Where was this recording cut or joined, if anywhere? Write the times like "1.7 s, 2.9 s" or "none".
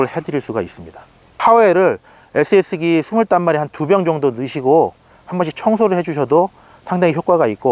1.4 s